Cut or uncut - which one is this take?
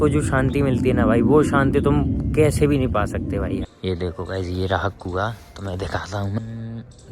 cut